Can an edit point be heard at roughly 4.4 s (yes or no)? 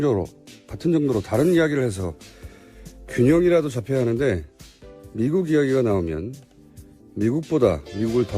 yes